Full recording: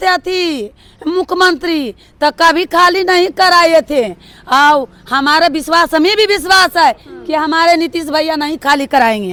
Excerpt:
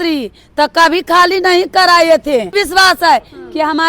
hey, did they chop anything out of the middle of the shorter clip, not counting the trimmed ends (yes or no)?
yes